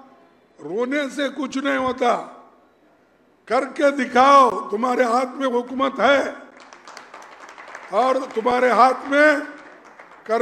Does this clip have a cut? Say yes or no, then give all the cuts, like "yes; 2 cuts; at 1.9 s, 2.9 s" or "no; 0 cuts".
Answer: no; 0 cuts